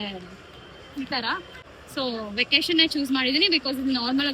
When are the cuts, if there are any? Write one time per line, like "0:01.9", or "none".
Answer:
0:01.6

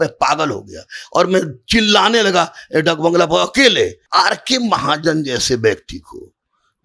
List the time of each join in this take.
0:04.0

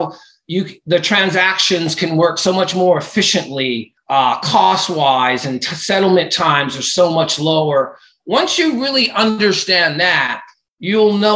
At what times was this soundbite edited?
0:03.9

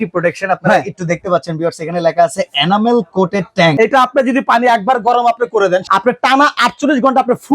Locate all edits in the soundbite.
0:03.7
0:05.9

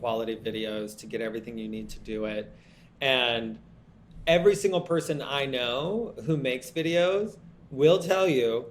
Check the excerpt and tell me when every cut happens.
none

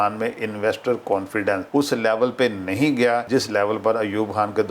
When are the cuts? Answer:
0:01.6
0:03.2

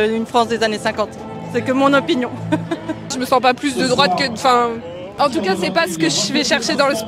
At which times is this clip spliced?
0:03.1
0:05.1

